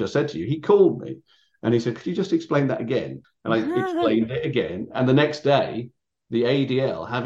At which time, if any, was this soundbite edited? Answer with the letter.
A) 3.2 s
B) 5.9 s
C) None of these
A